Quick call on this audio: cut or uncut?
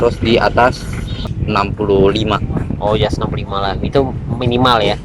cut